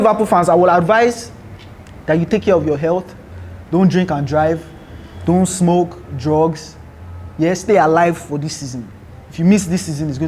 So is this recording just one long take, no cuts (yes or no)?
yes